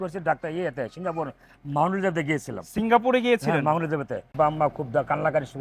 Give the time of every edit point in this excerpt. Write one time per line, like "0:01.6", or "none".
0:04.3

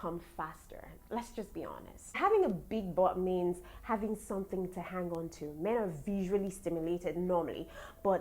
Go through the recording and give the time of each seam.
0:02.2

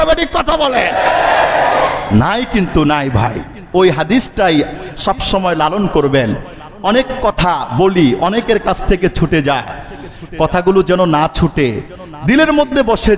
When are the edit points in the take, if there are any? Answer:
none

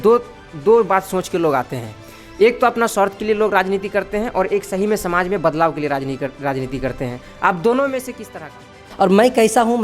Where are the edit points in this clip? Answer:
0:08.9

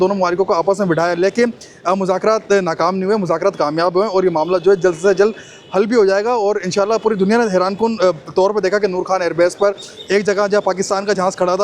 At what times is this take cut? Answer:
none

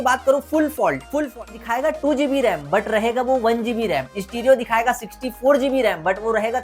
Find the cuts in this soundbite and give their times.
0:01.5

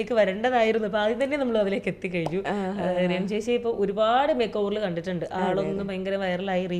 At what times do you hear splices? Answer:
none

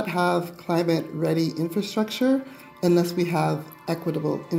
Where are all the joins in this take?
none

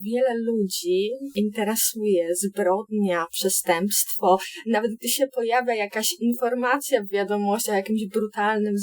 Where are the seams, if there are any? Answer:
0:01.2

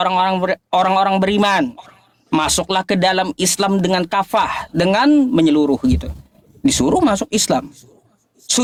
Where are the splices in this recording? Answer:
none

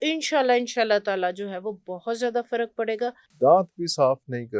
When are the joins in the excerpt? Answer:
0:03.2

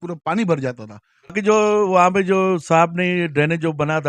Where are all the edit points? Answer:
0:01.3

